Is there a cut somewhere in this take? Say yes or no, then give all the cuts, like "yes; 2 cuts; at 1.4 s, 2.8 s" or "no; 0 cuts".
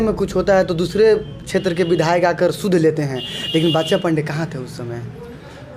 no; 0 cuts